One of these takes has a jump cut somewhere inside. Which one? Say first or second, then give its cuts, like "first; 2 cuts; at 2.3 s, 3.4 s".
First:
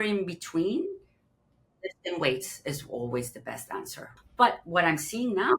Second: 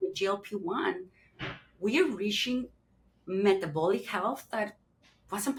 first; 1 cut; at 4.0 s